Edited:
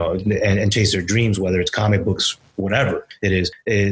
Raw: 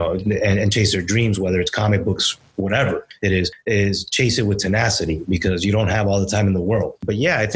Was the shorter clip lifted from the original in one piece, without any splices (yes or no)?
yes